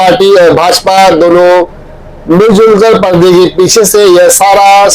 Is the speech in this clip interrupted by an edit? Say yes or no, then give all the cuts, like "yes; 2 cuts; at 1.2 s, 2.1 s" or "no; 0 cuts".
no; 0 cuts